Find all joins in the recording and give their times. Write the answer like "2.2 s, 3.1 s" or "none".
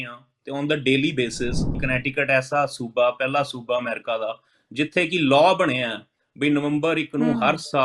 1.8 s